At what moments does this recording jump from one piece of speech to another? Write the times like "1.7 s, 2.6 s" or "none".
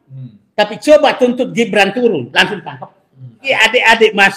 3.4 s